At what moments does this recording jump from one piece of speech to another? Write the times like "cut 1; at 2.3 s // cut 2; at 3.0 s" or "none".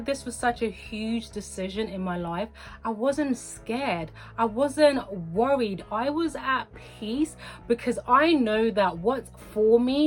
none